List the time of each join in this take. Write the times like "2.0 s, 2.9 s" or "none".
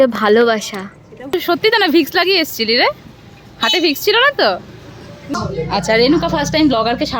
1.4 s, 5.3 s